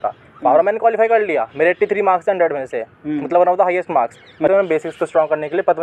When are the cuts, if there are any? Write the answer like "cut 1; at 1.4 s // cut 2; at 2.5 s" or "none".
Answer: cut 1; at 4.5 s